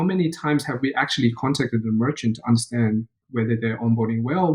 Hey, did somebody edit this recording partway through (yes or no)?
yes